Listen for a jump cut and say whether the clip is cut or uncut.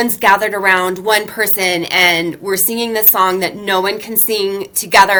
uncut